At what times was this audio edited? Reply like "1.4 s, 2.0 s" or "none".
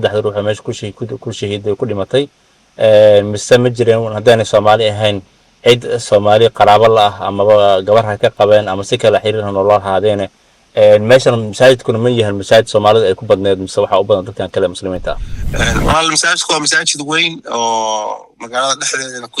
15.3 s